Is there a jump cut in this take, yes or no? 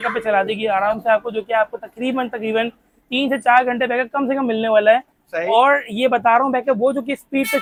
no